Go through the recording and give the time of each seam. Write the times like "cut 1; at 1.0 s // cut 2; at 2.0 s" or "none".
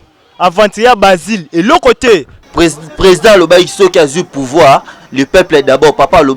cut 1; at 2.4 s